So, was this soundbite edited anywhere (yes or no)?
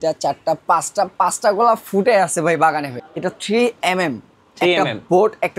yes